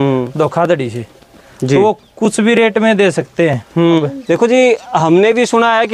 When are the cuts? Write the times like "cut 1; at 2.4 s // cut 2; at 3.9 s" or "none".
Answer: cut 1; at 4.0 s